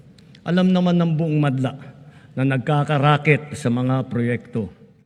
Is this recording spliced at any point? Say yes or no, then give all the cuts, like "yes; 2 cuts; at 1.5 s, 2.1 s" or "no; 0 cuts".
no; 0 cuts